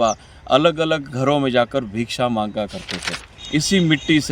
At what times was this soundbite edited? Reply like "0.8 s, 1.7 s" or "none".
3.3 s